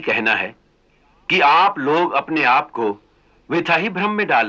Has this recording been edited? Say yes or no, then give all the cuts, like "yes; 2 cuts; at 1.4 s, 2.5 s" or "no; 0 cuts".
no; 0 cuts